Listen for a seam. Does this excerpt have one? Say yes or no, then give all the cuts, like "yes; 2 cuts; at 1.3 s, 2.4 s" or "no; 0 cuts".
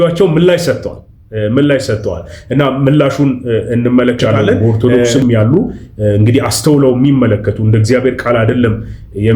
yes; 1 cut; at 4.8 s